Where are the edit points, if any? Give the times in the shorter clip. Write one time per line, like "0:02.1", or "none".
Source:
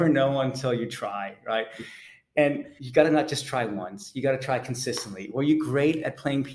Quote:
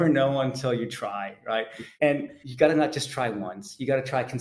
0:01.8

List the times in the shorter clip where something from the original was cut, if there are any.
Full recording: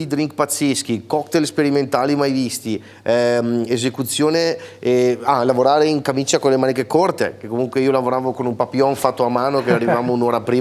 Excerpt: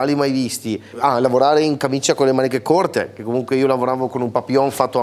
0:01.0

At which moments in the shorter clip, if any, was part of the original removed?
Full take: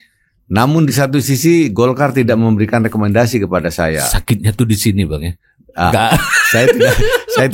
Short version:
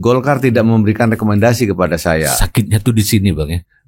none

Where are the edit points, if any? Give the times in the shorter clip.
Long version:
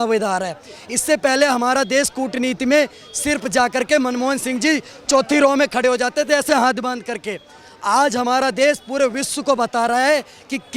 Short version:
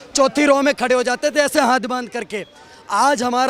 none

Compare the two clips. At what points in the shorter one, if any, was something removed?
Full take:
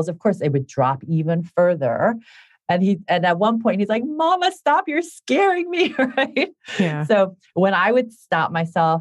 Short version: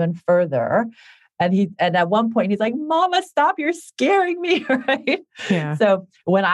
none

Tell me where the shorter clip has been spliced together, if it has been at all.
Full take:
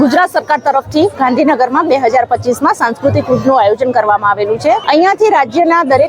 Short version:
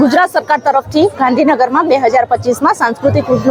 none

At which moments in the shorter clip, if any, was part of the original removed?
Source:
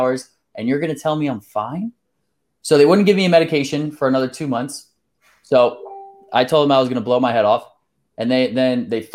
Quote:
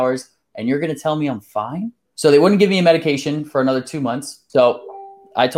0:02.0
0:04.3

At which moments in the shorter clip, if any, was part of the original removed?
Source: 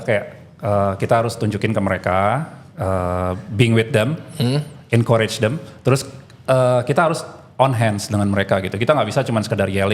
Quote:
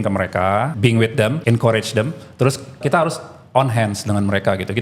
0:01.1
0:02.8

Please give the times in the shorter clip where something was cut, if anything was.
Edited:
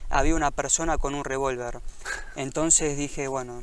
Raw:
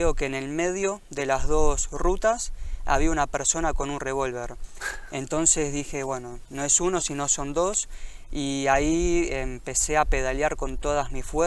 none

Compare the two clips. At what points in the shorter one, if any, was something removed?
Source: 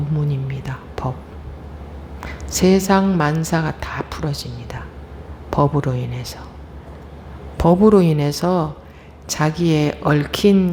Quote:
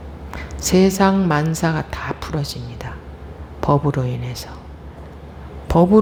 none

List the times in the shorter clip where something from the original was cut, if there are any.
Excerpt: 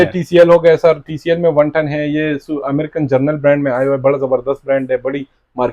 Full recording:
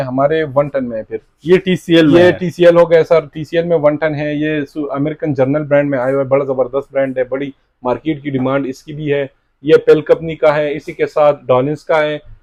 none

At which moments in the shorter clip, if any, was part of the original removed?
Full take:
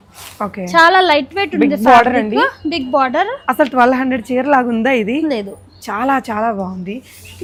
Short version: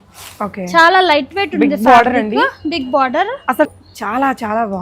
0:03.7

